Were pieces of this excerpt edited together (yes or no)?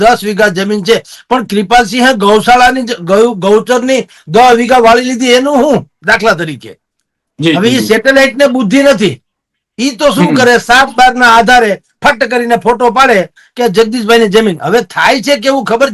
no